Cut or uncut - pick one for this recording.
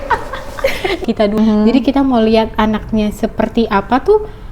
cut